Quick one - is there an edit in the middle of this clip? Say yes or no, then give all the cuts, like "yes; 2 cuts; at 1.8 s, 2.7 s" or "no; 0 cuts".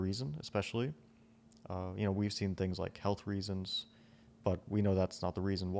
no; 0 cuts